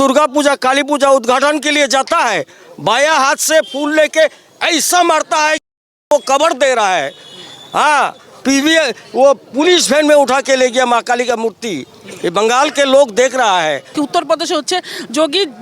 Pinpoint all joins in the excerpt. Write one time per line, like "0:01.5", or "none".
0:13.9